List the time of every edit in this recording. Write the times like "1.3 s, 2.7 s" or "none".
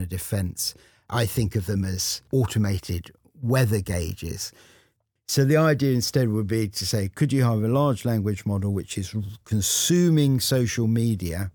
1.1 s, 2.1 s, 4.9 s